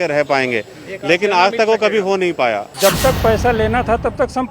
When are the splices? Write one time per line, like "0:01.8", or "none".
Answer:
0:02.7